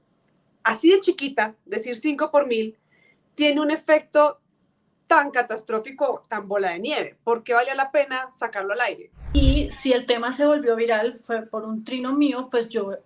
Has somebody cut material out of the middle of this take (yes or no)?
yes